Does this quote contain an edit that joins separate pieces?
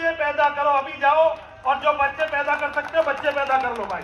no; 0 cuts

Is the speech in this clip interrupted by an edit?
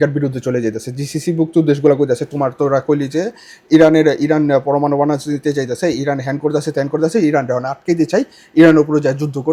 no; 0 cuts

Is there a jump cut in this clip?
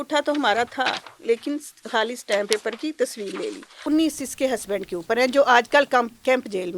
yes; 1 cut; at 3.8 s

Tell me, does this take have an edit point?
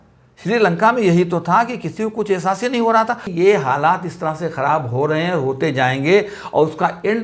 yes; 1 cut; at 3.3 s

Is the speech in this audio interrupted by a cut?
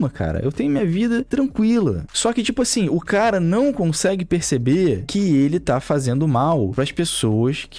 yes; 1 cut; at 2.1 s

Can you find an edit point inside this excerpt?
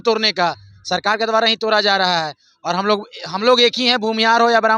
no; 0 cuts

